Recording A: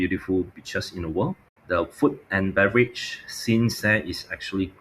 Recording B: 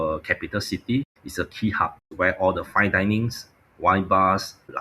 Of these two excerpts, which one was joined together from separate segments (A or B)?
B